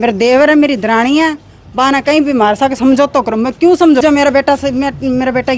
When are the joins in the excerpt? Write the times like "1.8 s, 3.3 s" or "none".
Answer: 4.0 s